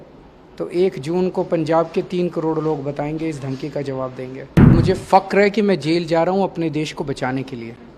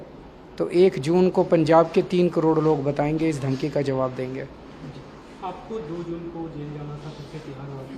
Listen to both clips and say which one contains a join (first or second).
first